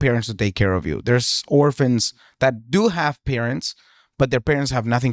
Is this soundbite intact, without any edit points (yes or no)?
yes